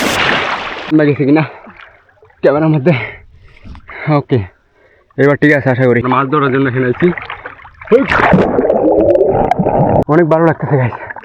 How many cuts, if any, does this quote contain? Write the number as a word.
three